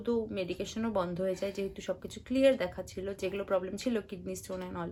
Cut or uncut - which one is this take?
uncut